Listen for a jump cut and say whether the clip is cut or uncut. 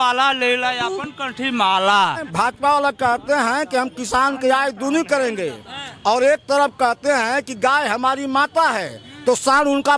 cut